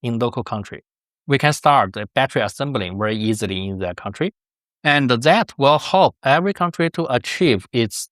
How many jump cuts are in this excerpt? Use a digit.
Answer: 1